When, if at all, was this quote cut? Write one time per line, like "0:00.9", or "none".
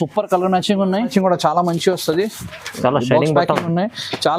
0:01.1

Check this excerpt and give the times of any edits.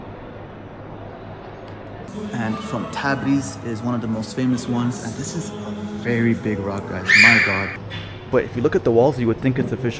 0:02.1
0:07.7

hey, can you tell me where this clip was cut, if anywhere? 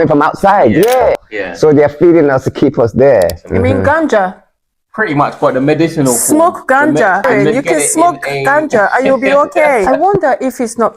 0:01.1
0:03.4
0:07.2
0:09.8

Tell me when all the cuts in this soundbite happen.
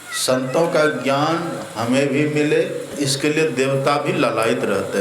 0:02.9

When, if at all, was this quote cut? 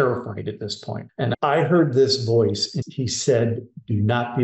0:00.9
0:02.7

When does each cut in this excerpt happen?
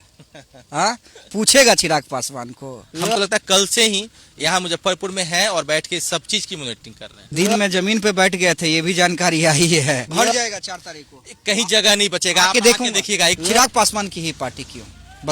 0:02.8
0:10.1
0:13.4

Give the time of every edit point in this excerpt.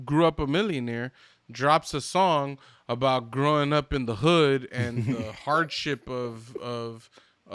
none

